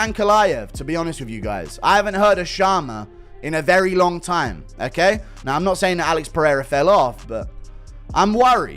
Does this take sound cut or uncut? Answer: uncut